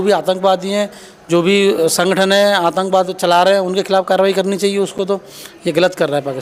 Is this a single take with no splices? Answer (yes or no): yes